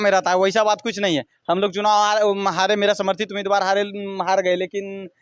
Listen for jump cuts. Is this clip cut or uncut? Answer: uncut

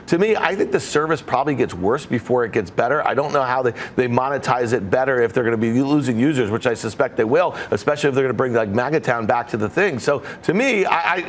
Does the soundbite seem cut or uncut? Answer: uncut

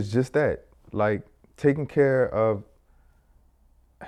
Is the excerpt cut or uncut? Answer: uncut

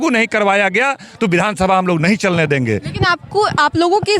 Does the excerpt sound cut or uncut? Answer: uncut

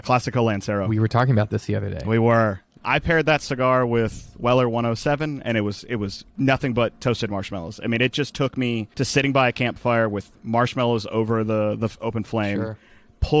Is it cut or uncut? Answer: cut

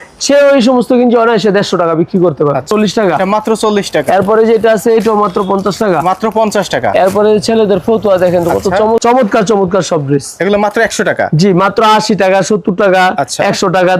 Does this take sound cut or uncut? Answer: cut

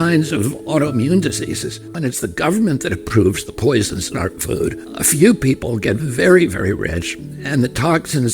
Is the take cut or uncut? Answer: cut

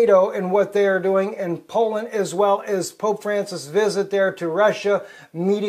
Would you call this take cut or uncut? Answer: cut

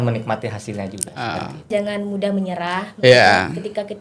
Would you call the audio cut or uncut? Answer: cut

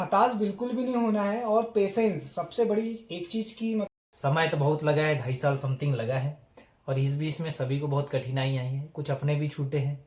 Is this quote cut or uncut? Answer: cut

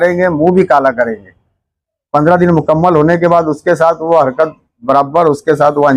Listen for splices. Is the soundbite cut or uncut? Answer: uncut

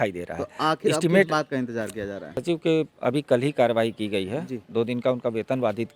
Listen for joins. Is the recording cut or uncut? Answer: cut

